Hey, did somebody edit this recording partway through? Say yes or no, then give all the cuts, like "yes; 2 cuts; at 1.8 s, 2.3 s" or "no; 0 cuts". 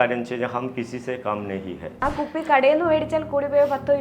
yes; 1 cut; at 2.0 s